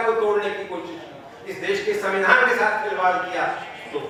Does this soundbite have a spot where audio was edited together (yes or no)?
no